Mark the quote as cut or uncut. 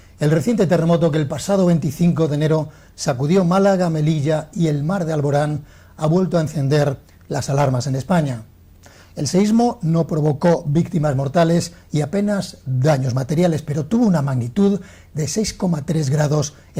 uncut